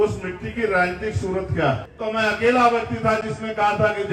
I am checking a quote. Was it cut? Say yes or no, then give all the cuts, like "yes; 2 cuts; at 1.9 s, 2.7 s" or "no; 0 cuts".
yes; 1 cut; at 1.9 s